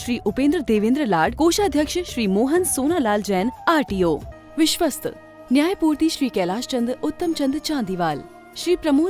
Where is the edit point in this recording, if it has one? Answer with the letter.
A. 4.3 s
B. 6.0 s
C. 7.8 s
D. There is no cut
A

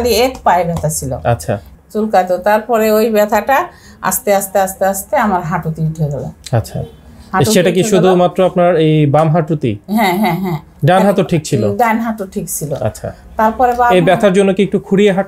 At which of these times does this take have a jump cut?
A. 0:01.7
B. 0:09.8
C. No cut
A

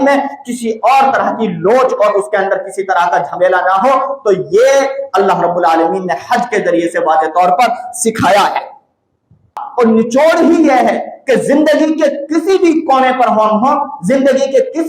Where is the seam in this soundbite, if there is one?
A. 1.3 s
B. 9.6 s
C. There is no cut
B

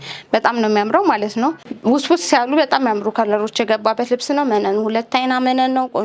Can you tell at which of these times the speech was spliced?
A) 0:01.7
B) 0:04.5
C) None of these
A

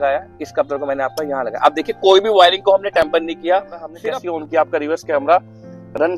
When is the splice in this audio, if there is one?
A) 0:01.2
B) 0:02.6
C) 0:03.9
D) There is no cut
C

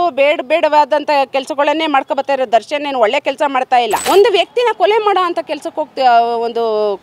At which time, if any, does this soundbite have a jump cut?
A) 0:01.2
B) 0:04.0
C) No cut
B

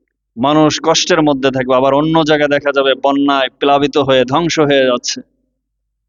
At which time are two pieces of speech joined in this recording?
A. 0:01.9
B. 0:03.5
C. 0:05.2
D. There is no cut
D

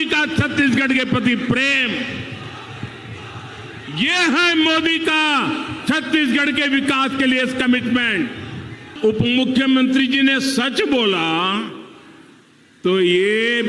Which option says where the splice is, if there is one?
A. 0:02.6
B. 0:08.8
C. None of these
B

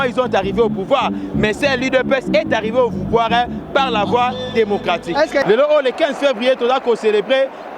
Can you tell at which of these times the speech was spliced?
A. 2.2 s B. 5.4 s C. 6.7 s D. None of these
B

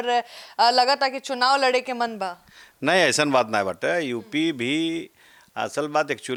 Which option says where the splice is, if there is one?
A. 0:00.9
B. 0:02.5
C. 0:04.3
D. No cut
D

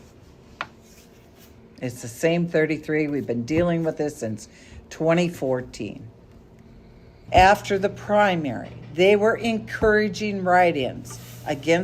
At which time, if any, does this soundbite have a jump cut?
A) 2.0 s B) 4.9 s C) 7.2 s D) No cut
C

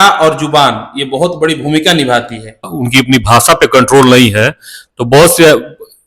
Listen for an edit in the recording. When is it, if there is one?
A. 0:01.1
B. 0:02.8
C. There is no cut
B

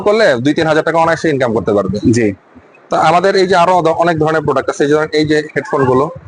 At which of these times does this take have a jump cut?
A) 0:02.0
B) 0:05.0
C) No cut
C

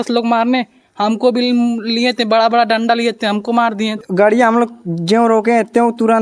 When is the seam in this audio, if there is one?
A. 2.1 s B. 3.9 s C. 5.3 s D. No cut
B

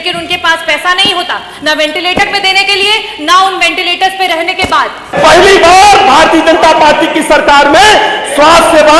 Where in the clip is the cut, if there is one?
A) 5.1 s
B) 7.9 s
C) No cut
A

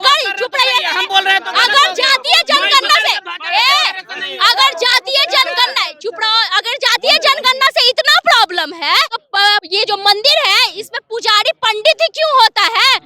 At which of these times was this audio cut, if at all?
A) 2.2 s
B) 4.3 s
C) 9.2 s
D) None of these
C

